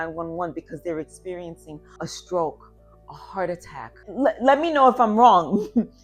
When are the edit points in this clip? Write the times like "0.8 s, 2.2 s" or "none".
2.1 s, 4.1 s